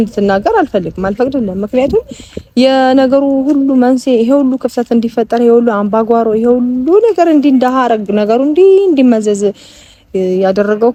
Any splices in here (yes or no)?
no